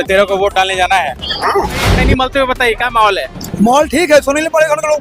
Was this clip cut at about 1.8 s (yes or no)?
yes